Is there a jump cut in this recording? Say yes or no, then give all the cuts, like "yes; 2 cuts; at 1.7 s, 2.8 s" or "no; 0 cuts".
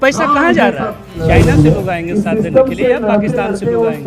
yes; 1 cut; at 1.1 s